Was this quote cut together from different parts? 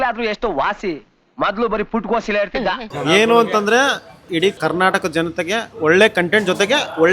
yes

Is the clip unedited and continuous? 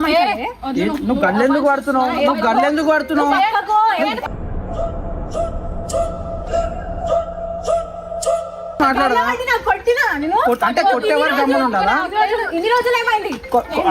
yes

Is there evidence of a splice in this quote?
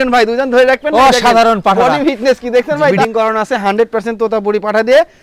yes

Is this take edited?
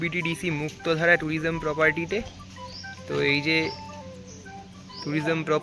no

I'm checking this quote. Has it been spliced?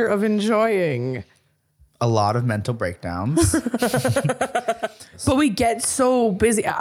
yes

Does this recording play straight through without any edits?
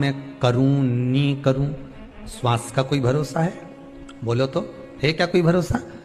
yes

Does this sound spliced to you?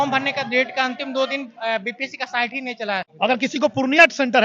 yes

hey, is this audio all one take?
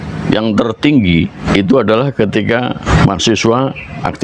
no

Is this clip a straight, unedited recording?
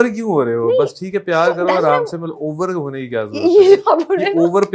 yes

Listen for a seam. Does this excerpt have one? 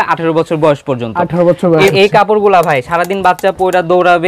yes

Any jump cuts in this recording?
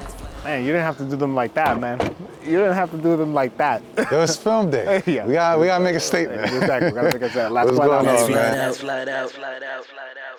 no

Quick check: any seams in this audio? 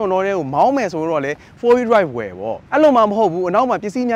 no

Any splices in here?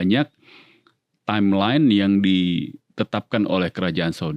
no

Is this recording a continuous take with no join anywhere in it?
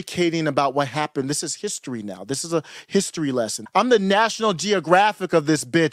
no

